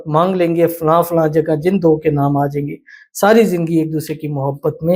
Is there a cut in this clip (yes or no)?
no